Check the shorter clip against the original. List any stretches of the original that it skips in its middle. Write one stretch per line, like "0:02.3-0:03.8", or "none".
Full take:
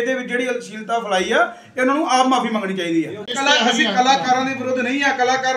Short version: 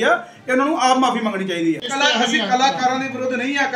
0:03.2-0:03.3